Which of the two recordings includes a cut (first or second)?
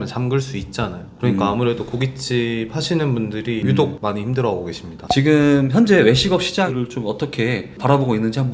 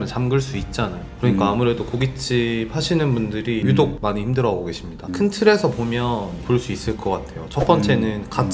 second